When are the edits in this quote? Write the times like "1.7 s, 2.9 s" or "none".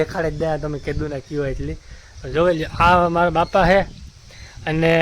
none